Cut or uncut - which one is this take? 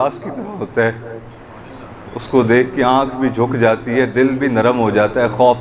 uncut